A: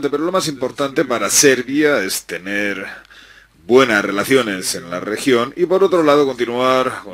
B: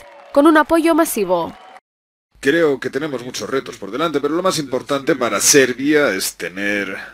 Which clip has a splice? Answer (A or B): B